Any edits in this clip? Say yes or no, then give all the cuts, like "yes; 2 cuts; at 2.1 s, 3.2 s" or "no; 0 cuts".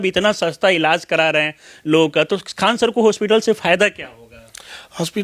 no; 0 cuts